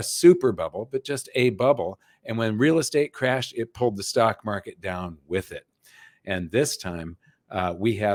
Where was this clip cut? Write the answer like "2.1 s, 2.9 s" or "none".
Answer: none